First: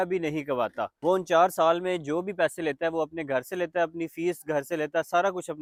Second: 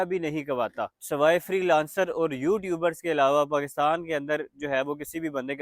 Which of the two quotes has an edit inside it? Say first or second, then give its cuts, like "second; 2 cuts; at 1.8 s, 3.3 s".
second; 1 cut; at 0.9 s